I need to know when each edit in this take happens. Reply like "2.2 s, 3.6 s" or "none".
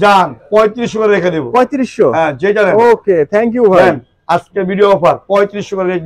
none